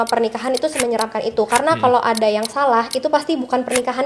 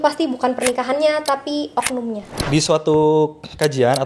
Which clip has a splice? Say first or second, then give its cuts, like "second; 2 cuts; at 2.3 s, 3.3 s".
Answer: second; 1 cut; at 2.3 s